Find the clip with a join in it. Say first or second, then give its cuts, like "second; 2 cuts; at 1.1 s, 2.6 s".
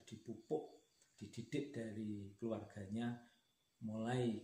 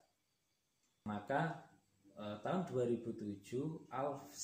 second; 1 cut; at 1.1 s